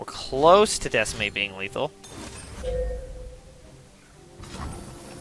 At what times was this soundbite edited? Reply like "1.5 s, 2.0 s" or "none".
none